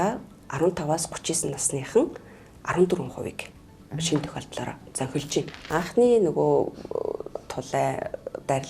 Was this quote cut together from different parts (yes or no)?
yes